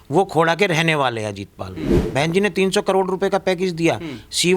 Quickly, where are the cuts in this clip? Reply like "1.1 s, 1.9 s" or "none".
2.0 s

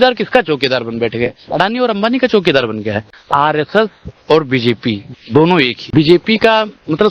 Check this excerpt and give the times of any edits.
3.2 s, 5.8 s

